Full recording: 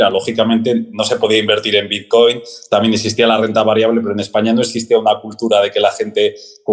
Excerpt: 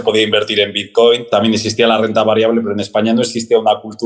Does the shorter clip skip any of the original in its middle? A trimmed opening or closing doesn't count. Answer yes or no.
yes